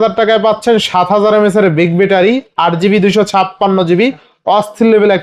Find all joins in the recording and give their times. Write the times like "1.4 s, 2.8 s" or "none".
none